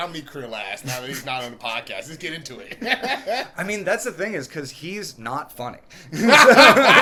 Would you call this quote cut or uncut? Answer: uncut